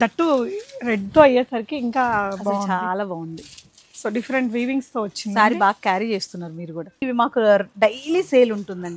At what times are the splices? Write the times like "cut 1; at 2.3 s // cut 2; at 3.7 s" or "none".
cut 1; at 7.1 s